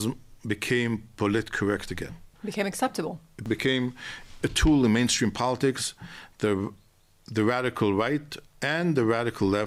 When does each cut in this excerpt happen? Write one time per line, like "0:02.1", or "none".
0:02.3
0:03.4